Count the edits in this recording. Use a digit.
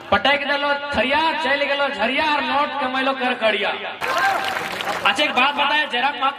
1